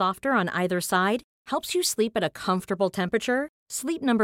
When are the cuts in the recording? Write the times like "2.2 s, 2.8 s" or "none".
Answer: none